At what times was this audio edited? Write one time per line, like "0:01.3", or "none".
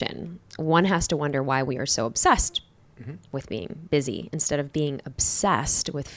none

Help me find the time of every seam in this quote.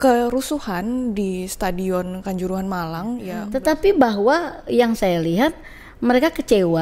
0:03.3

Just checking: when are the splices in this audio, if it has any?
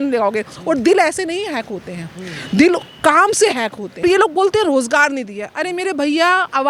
0:04.0

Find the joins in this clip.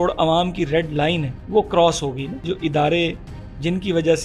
0:01.3
0:02.4

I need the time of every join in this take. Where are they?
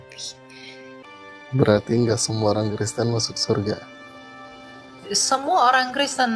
0:01.0

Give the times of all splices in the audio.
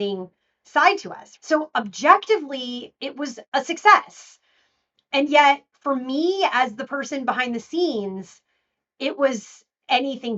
0:01.2

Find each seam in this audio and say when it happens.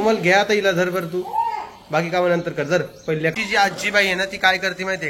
0:03.3

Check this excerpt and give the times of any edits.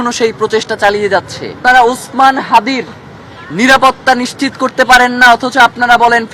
0:01.5

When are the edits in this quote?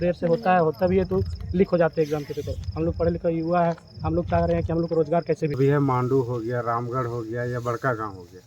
0:05.6

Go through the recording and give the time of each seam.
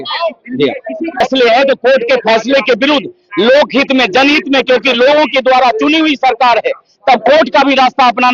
0:01.2

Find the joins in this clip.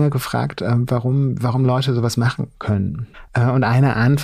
0:03.1

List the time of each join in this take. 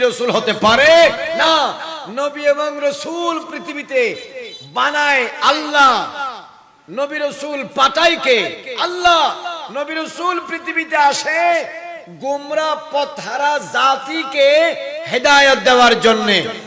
none

